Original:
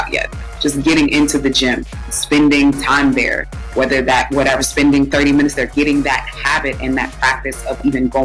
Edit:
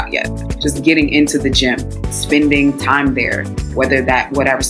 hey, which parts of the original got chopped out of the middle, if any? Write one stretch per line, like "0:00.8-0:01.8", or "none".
none